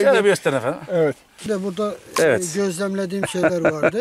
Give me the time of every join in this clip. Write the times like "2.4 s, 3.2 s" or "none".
1.4 s